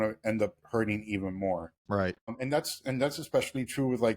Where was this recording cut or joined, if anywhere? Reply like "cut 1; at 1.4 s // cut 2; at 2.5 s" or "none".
cut 1; at 1.7 s